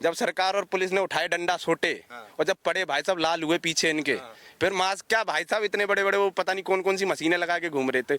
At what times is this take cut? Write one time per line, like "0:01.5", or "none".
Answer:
none